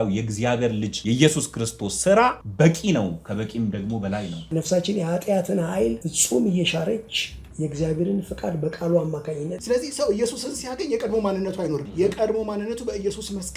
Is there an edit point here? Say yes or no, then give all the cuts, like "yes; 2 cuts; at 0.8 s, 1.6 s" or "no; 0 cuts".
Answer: yes; 6 cuts; at 0.9 s, 2.4 s, 4.5 s, 6.1 s, 9.6 s, 11.9 s